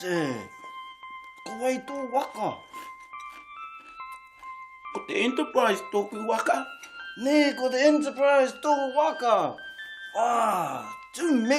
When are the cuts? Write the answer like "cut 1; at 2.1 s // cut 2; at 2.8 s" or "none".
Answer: none